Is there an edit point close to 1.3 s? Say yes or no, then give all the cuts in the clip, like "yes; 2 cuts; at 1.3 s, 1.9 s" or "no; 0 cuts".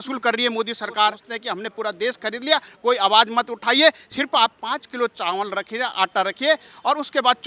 yes; 1 cut; at 1.3 s